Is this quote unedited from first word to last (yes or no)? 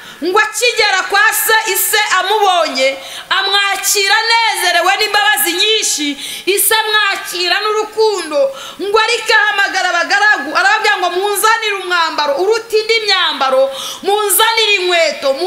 yes